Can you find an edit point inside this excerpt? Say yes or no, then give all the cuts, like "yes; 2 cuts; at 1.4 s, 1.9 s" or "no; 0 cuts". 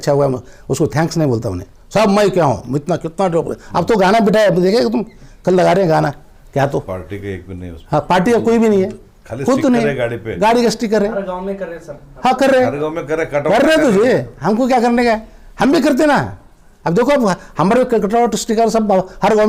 no; 0 cuts